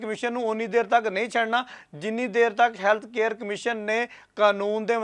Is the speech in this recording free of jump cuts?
yes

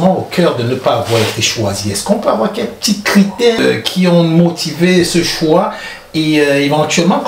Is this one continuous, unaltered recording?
no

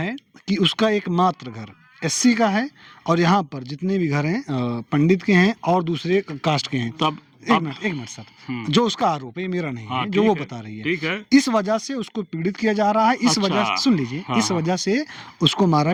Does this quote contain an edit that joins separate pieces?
no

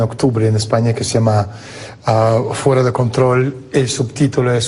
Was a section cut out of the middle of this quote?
yes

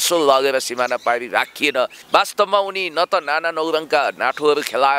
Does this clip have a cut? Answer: yes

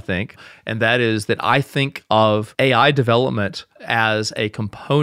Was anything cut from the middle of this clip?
yes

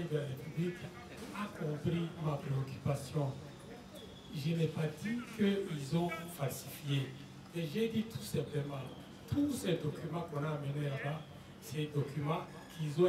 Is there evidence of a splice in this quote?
no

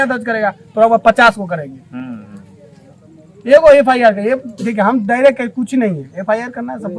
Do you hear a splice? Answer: no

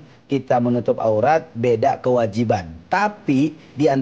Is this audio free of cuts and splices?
no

